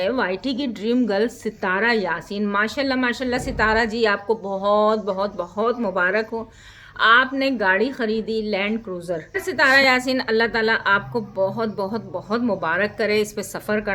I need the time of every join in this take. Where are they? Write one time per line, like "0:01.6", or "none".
0:09.4